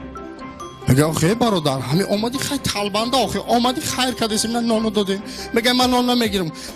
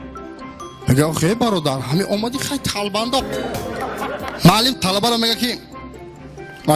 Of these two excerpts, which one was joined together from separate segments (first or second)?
first